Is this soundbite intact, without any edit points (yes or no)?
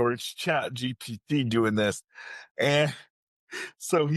yes